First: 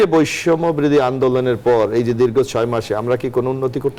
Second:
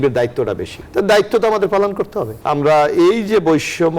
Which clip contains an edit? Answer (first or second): second